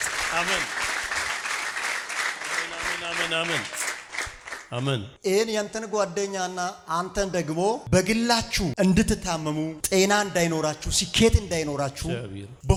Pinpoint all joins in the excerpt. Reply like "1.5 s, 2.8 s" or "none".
none